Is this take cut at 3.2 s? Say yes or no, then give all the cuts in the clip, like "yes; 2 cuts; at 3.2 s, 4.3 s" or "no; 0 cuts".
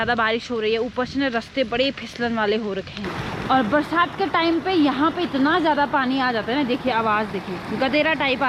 yes; 1 cut; at 3.2 s